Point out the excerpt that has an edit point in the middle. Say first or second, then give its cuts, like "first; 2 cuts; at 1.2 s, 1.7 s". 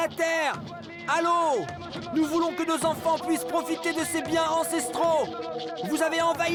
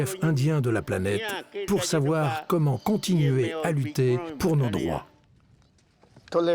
second; 2 cuts; at 4.3 s, 5.1 s